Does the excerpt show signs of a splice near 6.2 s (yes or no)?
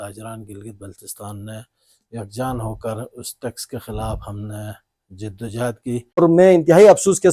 yes